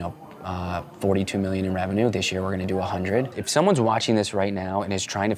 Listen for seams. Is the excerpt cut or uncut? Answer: cut